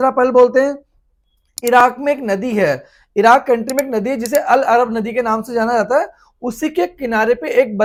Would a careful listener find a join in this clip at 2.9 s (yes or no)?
no